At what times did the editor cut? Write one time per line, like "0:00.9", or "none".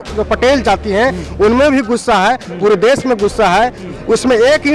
0:03.8

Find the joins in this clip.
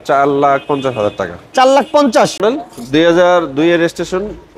0:02.4

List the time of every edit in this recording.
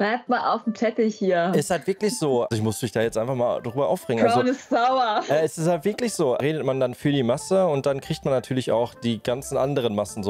0:02.5
0:06.4

